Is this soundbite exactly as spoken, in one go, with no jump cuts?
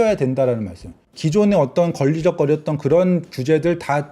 no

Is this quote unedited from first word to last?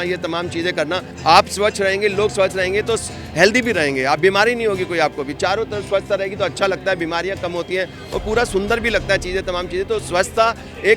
no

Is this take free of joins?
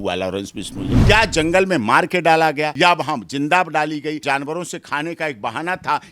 no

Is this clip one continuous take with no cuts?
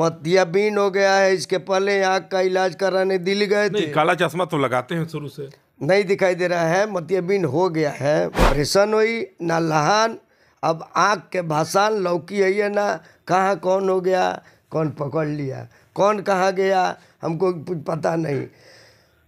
no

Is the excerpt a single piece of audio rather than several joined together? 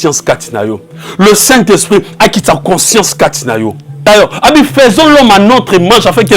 no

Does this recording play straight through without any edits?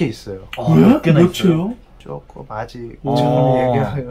yes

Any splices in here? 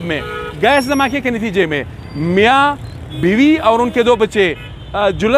no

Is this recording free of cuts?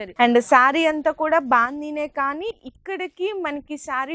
yes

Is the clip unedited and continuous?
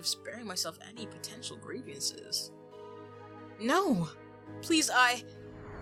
yes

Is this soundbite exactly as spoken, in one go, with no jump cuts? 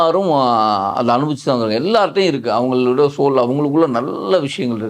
yes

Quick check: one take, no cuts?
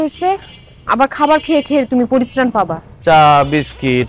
no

